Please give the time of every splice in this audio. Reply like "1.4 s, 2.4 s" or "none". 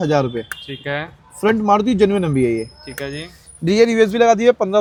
none